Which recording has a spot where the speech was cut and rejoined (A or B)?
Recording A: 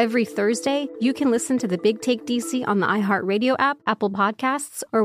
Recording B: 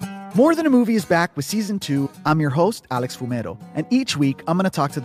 A